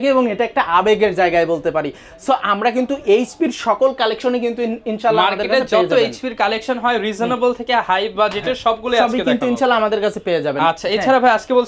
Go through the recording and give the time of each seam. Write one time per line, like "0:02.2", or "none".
none